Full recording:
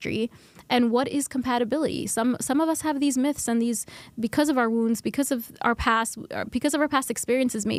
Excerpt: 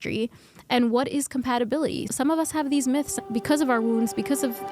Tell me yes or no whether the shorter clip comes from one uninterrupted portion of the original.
no